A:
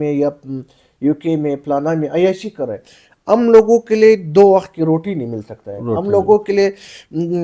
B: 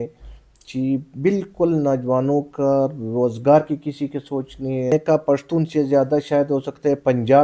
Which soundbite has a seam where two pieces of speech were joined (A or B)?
B